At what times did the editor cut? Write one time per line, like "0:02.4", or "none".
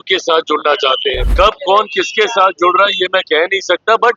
0:01.2